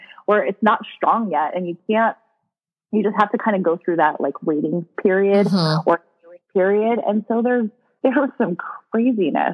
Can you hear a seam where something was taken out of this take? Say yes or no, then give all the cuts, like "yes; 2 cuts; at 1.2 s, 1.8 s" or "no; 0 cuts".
no; 0 cuts